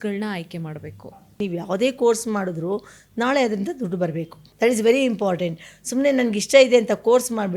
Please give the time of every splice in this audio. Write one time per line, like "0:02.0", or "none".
0:01.4
0:04.4